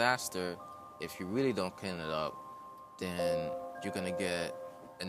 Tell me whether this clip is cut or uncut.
cut